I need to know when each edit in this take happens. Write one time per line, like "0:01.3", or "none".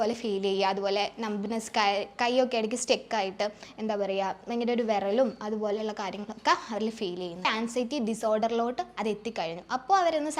0:07.5